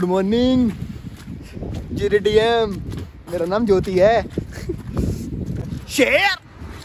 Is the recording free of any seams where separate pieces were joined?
no; 1 cut; at 5.6 s

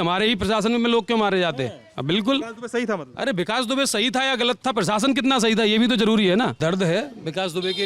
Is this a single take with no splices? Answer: no; 1 cut; at 6.6 s

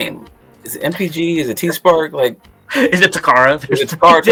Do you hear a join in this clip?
no; 0 cuts

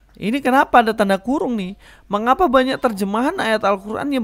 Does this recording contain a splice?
no; 0 cuts

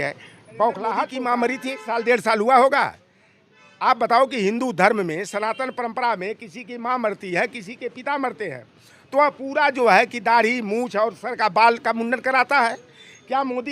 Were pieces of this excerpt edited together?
yes; 1 cut; at 1.1 s

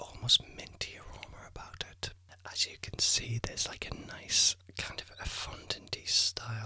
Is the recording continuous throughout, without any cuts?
no; 2 cuts; at 2.3 s, 4.5 s

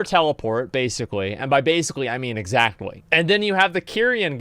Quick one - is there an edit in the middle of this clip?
yes; 1 cut; at 2.9 s

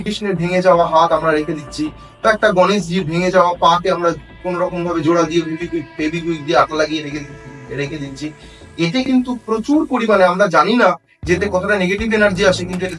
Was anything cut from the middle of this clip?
no; 0 cuts

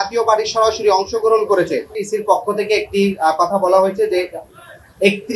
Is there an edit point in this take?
yes; 1 cut; at 2.0 s

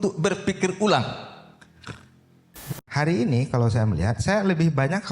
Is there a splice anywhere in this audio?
yes; 1 cut; at 2.8 s

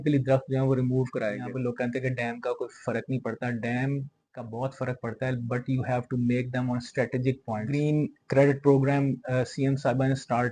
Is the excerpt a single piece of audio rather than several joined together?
no; 2 cuts; at 1.5 s, 7.7 s

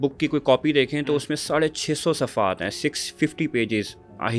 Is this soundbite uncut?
yes; 0 cuts

